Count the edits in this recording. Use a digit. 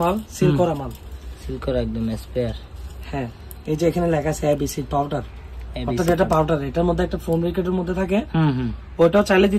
0